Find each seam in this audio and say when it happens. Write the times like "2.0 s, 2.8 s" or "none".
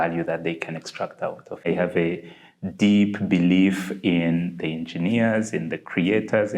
1.6 s